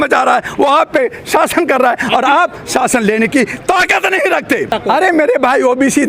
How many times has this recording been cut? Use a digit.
0